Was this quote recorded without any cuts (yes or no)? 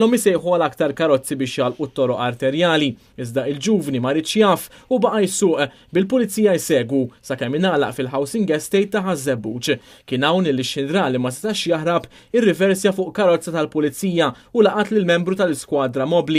yes